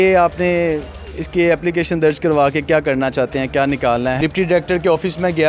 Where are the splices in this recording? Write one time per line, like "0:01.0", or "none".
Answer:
0:04.2